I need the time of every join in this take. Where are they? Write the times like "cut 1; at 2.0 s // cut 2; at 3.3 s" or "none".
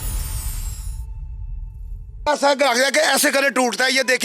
cut 1; at 2.1 s